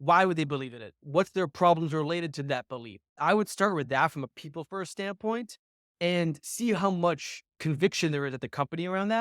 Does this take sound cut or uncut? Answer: cut